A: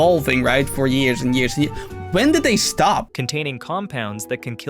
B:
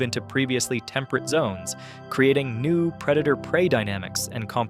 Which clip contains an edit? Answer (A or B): A